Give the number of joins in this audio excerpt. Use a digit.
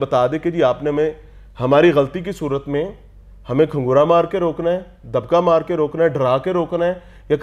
0